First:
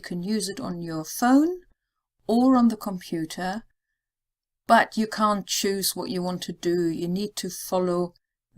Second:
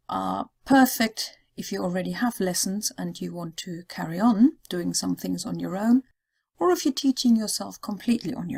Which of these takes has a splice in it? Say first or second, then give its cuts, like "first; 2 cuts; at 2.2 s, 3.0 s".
first; 1 cut; at 6.0 s